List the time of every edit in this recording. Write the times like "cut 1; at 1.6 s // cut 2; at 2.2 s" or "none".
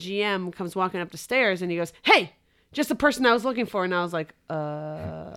none